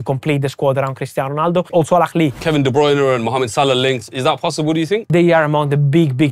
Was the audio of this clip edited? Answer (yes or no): yes